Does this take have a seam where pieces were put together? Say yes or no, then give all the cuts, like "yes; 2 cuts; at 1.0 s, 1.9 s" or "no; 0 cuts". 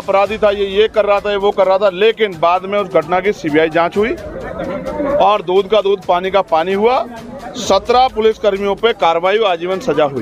no; 0 cuts